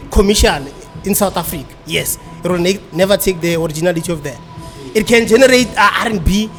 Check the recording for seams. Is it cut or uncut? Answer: uncut